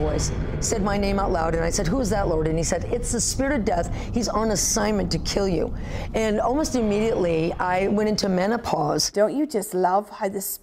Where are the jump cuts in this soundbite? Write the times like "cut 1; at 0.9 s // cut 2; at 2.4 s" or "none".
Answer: cut 1; at 9.1 s